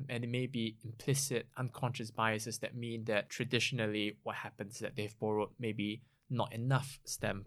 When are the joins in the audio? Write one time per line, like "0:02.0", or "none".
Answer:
0:03.3